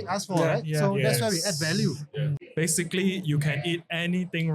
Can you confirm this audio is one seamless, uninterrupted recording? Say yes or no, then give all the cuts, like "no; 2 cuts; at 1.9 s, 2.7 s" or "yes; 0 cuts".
no; 1 cut; at 2.4 s